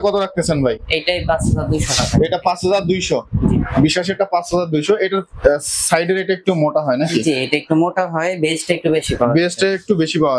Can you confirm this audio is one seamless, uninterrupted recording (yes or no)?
yes